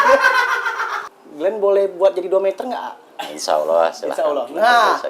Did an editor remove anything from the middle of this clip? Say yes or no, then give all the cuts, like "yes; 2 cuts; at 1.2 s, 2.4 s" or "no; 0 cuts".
yes; 1 cut; at 1.0 s